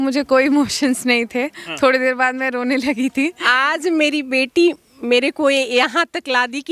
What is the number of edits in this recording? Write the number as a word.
one